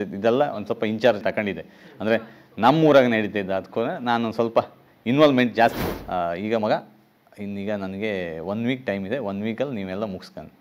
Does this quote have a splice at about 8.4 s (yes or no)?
no